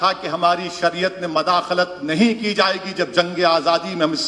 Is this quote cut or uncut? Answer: uncut